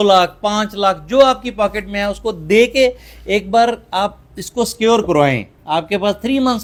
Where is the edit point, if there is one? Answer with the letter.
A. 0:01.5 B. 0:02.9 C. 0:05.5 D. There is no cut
D